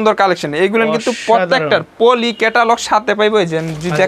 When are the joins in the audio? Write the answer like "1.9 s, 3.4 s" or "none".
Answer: none

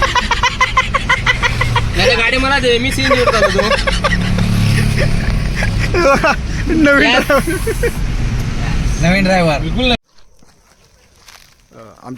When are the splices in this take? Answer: 10.0 s

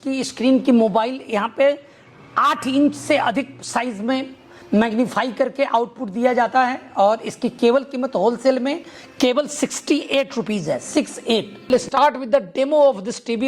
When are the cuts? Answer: 11.7 s

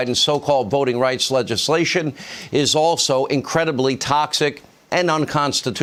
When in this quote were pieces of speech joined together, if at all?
none

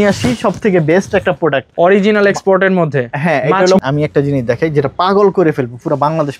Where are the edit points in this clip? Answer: 3.8 s

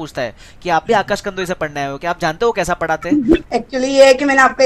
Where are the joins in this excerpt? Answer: 3.5 s

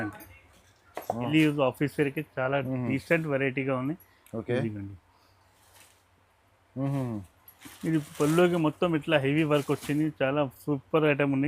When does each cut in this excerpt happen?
1.3 s

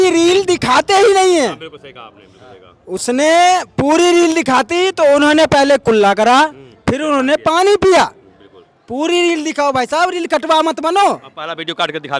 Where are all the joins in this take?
none

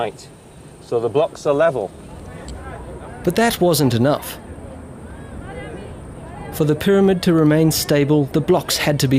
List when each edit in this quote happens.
8.2 s

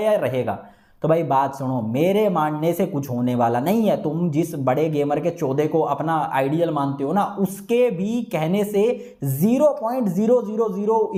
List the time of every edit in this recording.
none

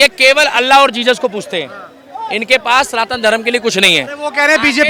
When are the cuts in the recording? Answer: none

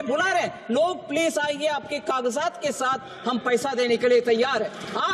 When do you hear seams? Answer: none

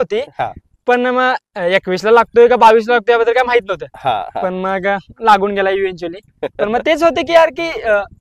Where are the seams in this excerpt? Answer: none

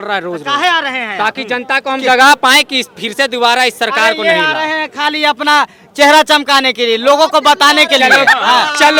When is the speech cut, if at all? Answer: none

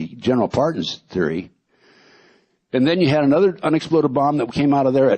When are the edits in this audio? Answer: 4.1 s

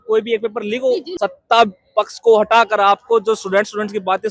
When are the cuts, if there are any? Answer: 1.1 s

